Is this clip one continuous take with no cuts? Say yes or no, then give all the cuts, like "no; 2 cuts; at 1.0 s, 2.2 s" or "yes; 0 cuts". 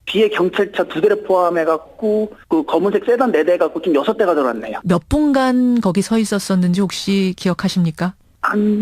yes; 0 cuts